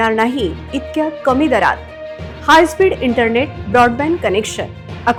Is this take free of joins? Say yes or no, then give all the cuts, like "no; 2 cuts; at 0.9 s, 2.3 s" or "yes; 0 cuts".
yes; 0 cuts